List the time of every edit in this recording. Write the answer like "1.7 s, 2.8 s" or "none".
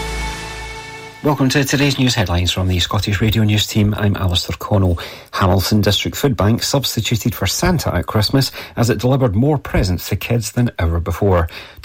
1.1 s